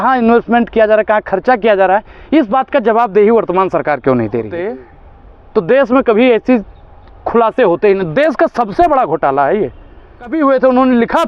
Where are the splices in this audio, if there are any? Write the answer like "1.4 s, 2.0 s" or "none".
4.8 s, 10.3 s